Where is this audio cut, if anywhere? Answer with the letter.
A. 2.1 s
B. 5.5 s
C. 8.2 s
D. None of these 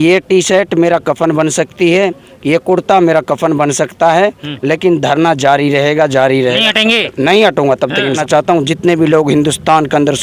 C